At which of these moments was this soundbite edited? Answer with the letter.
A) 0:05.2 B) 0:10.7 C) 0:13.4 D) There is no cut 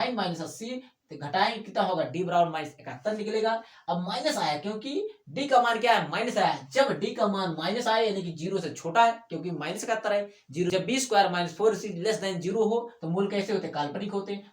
B